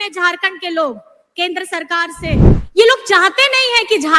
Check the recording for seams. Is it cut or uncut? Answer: cut